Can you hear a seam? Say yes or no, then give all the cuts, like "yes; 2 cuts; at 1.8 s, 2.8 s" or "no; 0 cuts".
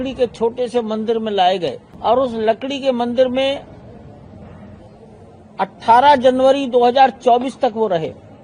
yes; 1 cut; at 1.9 s